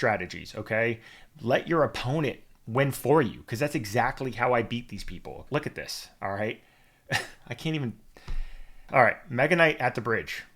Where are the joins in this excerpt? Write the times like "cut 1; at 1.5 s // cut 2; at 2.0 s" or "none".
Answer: cut 1; at 5.4 s // cut 2; at 8.8 s